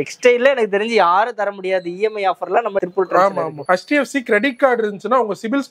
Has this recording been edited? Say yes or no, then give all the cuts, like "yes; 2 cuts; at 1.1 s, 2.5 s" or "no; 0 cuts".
no; 0 cuts